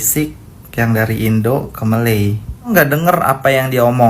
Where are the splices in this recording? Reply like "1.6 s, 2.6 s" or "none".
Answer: 2.7 s